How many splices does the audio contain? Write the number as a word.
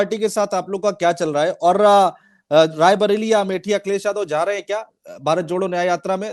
zero